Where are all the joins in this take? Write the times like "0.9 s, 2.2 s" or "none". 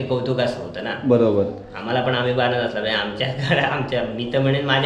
none